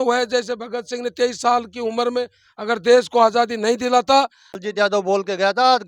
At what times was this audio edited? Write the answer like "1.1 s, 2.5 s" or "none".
4.6 s